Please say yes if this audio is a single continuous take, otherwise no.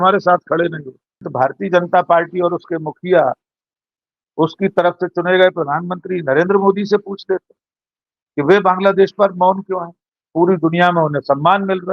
no